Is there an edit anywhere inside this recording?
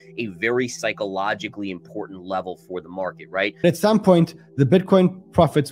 yes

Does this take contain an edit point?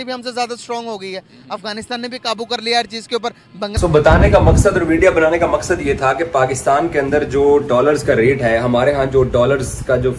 yes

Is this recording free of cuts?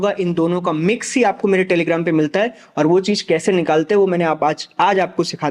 yes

